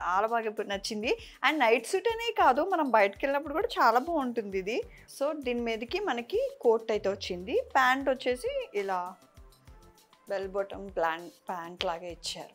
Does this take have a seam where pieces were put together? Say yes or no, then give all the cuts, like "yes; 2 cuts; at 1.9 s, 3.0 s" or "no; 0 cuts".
yes; 1 cut; at 5.0 s